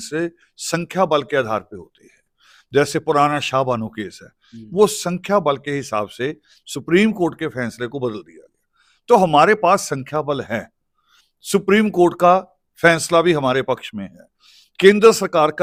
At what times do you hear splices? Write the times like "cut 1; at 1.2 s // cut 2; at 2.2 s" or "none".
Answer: none